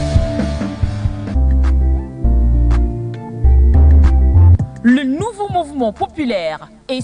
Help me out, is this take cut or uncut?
cut